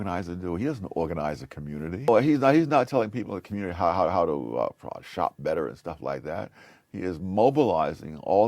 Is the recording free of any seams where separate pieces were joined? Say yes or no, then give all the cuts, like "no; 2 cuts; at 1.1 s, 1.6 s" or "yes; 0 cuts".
no; 1 cut; at 2.1 s